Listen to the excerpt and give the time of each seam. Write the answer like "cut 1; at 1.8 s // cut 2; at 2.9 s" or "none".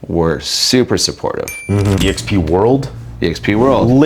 cut 1; at 2.0 s